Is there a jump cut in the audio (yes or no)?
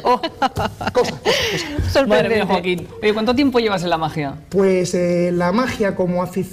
no